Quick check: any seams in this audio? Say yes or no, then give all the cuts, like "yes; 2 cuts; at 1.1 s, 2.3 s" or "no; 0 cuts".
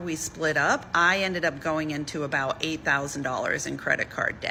no; 0 cuts